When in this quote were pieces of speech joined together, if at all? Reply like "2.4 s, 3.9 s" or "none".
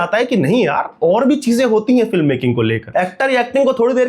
2.8 s

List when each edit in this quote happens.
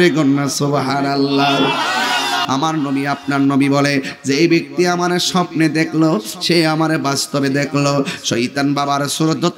2.4 s

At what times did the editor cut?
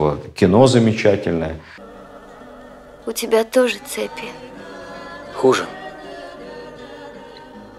none

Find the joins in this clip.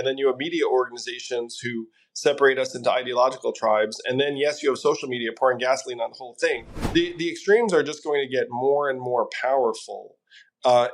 6.7 s

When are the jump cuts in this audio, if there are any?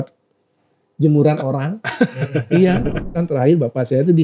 3.1 s

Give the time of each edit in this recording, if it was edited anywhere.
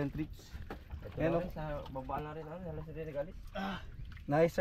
none

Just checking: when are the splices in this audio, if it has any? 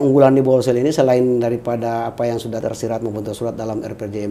2.6 s

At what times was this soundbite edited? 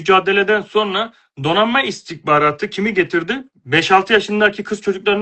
3.5 s

